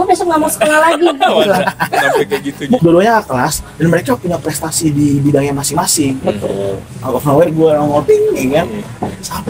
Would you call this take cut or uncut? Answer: cut